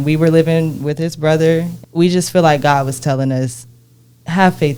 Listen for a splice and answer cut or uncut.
cut